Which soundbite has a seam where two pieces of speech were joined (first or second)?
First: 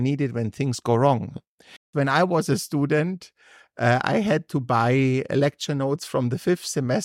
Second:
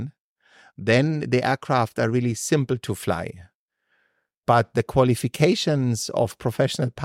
first